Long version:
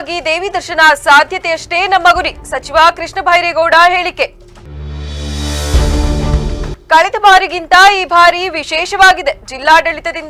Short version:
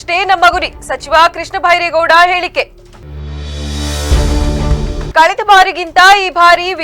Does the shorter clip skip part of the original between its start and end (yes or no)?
yes